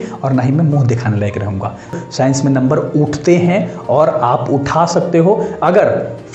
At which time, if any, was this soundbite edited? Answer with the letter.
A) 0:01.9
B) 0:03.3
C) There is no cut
A